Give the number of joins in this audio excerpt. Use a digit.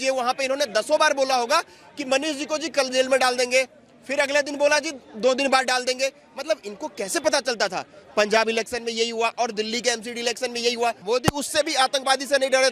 1